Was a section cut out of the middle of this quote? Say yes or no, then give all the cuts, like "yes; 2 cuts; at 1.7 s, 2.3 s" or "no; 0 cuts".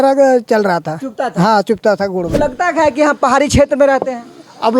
yes; 1 cut; at 2.3 s